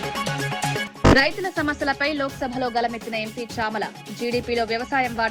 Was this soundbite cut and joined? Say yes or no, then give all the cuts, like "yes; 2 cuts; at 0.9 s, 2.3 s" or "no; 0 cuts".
no; 0 cuts